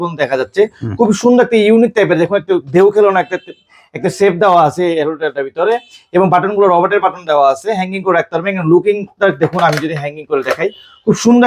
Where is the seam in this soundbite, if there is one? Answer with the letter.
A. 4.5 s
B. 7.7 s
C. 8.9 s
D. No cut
D